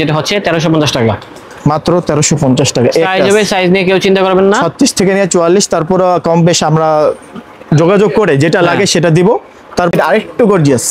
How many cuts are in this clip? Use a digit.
1